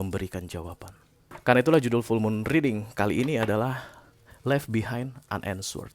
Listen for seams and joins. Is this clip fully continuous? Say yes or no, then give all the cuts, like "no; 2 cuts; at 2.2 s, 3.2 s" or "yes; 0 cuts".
no; 1 cut; at 1.3 s